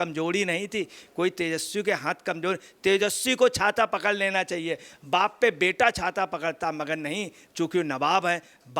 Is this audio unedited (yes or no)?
yes